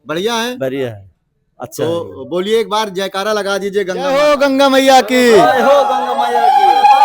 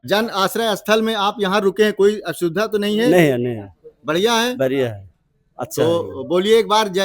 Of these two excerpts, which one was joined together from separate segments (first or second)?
first